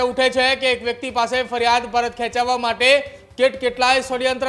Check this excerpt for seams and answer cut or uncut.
uncut